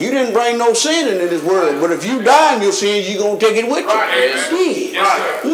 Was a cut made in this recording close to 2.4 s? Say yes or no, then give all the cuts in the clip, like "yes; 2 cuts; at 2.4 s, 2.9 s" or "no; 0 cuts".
no; 1 cut; at 4.4 s